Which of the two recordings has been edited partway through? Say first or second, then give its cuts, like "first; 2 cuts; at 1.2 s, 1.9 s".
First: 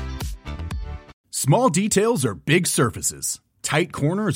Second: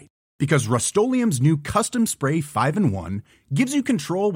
first; 1 cut; at 1.1 s